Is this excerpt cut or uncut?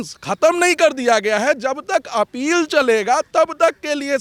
uncut